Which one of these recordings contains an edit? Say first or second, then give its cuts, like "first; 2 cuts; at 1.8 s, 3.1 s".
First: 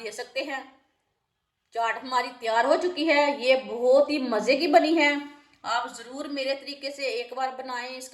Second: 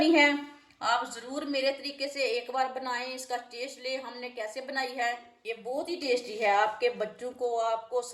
second; 1 cut; at 5.3 s